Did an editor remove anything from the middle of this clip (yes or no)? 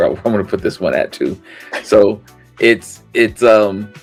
no